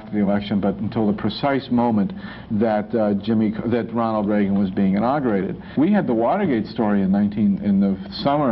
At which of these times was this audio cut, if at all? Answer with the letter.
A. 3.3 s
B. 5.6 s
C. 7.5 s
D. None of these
B